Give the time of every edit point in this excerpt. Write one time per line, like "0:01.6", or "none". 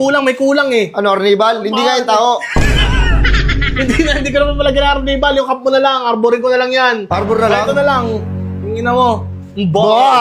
none